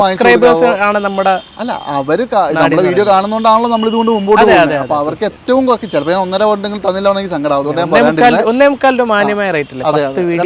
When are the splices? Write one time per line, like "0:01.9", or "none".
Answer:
none